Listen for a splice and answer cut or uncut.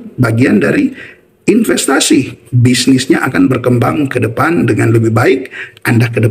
uncut